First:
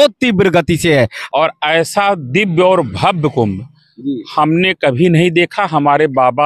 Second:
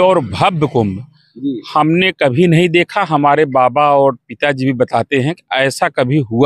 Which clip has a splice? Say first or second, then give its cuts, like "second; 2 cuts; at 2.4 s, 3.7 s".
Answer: first; 1 cut; at 1.2 s